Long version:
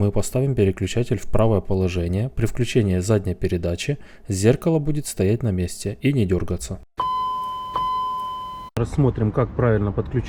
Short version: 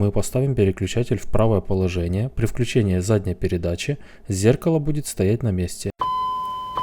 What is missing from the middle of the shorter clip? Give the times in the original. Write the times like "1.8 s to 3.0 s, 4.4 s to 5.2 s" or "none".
5.8 s to 6.8 s

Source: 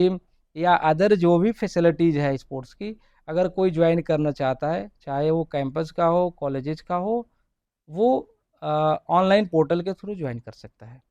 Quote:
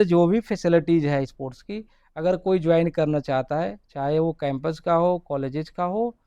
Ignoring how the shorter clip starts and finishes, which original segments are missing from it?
none

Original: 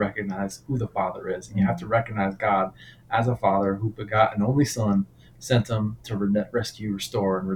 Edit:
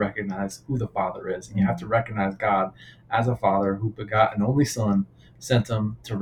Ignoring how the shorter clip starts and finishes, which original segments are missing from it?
none

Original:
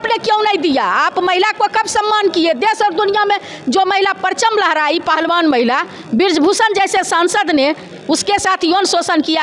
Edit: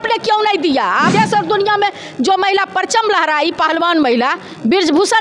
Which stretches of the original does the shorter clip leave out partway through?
1.1 s to 2.6 s

